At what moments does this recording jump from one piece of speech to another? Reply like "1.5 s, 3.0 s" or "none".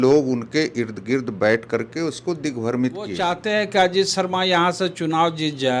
3.1 s